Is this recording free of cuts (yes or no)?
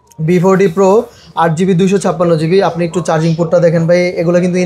yes